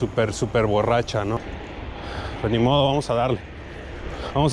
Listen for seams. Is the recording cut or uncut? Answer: cut